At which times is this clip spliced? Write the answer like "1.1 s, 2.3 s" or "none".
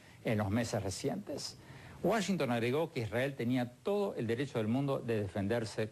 2.1 s